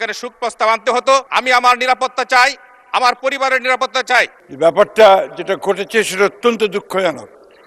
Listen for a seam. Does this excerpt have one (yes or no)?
yes